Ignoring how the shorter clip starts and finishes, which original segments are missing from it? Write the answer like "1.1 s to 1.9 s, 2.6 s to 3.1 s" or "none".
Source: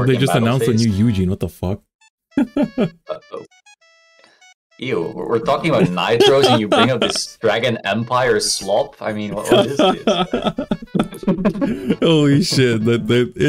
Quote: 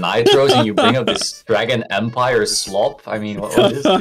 none